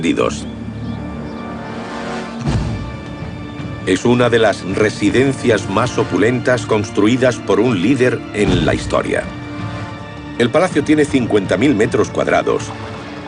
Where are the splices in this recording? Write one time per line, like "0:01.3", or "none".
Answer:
0:08.0

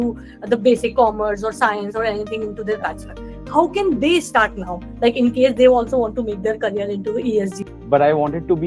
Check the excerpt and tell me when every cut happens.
0:07.6

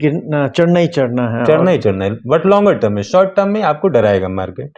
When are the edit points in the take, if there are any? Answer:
none

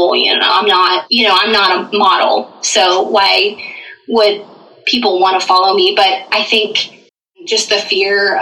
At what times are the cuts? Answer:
0:01.1
0:07.5

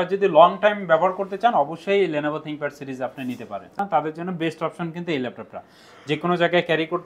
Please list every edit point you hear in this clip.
0:03.8

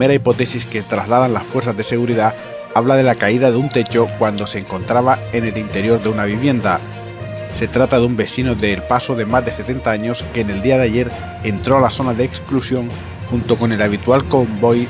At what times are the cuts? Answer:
none

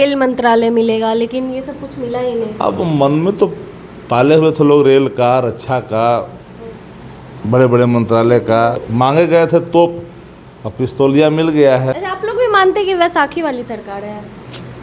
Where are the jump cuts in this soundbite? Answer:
0:08.9
0:12.0

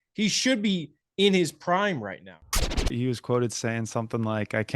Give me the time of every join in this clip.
0:02.6

